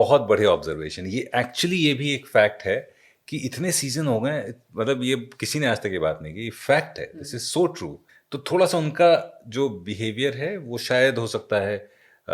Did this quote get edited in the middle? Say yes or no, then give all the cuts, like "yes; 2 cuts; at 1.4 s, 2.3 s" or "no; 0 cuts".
no; 0 cuts